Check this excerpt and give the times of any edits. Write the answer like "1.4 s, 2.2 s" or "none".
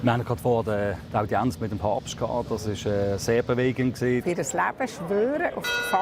4.2 s